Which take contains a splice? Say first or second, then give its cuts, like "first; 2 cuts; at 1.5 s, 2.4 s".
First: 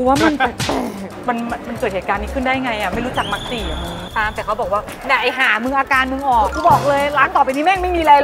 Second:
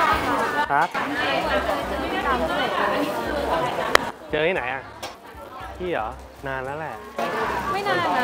first; 3 cuts; at 1.1 s, 4.0 s, 6.5 s